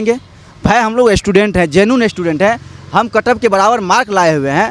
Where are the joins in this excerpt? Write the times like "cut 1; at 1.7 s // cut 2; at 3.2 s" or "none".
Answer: none